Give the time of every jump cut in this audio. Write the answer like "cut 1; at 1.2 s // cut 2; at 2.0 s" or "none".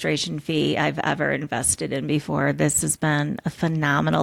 none